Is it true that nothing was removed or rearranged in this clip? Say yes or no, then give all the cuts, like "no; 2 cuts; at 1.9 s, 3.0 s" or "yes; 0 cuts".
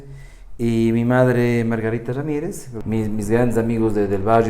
no; 1 cut; at 2.7 s